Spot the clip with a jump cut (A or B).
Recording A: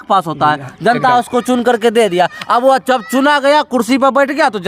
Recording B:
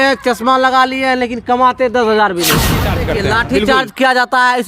B